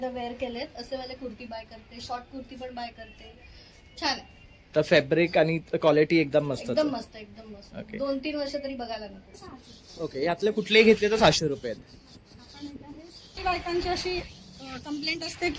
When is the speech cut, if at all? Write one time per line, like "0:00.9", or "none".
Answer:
0:09.2
0:13.4

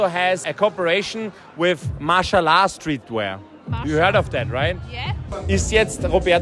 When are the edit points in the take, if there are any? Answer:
0:05.2

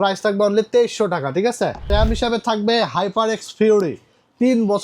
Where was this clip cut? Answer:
0:01.9

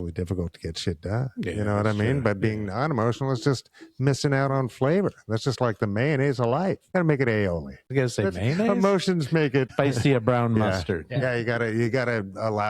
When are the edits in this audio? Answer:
0:06.8
0:07.8
0:09.7

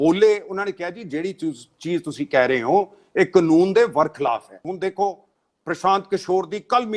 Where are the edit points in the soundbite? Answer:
0:04.5

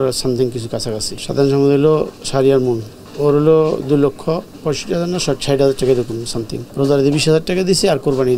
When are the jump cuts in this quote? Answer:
0:01.1
0:03.0
0:04.5
0:06.6

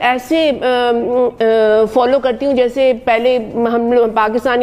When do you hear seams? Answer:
none

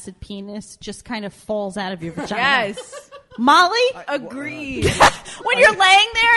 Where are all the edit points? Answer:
0:04.0

